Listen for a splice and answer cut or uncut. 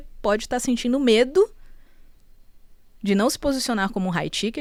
uncut